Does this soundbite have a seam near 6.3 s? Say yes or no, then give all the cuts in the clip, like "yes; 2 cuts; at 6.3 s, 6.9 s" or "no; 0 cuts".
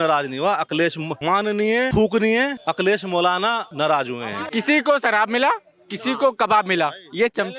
no; 4 cuts; at 1.4 s, 2.6 s, 3.7 s, 4.3 s